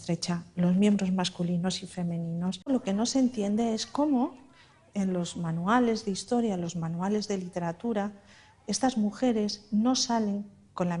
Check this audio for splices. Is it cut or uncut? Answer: cut